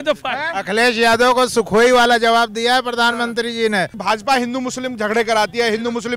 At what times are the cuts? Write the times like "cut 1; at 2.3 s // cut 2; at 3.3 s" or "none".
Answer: cut 1; at 4.0 s